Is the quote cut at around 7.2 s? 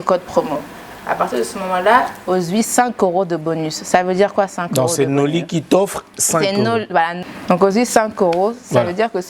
yes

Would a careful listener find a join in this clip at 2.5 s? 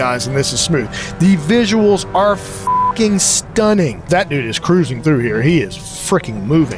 no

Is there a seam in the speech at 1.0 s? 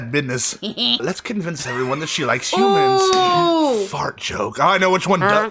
yes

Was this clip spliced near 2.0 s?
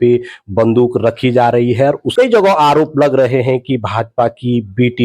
yes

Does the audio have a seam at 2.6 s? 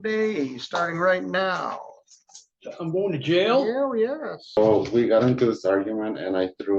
no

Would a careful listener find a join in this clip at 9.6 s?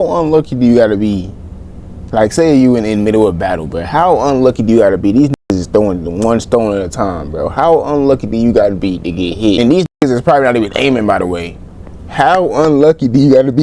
yes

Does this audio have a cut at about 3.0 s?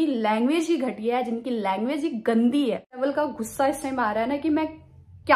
yes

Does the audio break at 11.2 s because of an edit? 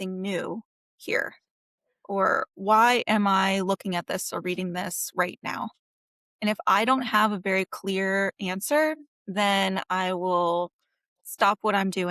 yes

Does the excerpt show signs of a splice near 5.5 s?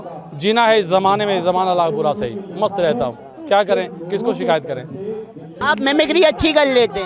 yes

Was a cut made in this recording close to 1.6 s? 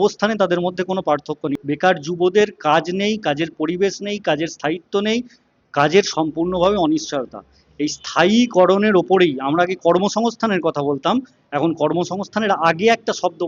yes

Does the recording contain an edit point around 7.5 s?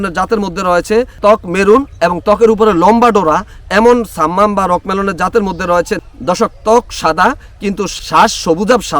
no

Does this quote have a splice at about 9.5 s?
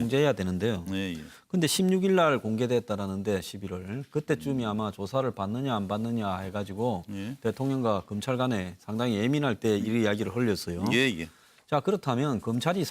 yes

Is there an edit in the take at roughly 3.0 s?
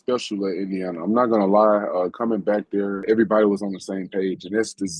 yes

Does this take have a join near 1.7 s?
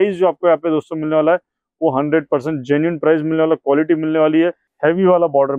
no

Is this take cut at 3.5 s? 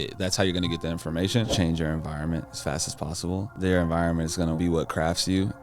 yes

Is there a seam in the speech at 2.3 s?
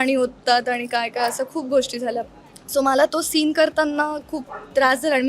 yes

